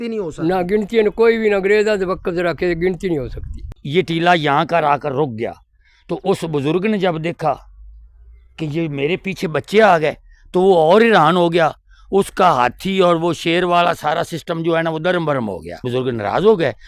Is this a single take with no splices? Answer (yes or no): no